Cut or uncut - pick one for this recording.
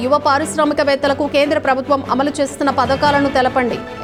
uncut